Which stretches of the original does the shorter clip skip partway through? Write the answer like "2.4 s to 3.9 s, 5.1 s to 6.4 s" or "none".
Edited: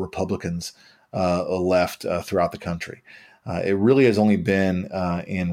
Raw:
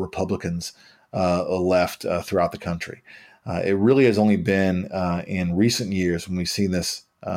none